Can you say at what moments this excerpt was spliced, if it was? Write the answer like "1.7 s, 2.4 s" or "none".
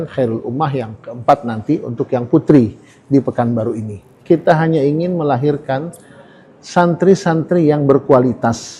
4.1 s

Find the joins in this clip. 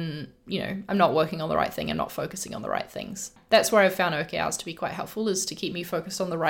3.4 s

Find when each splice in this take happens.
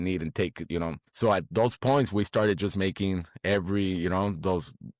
1.0 s

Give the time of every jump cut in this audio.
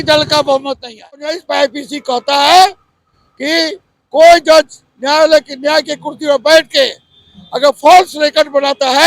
1.4 s

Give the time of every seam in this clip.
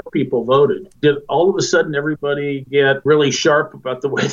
3.0 s

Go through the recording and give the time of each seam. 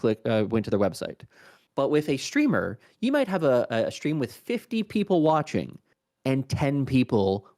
none

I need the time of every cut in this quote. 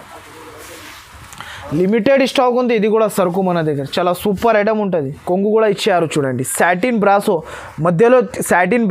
5.2 s

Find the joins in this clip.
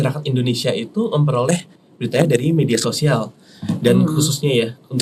none

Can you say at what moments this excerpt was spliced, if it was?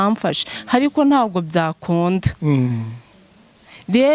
none

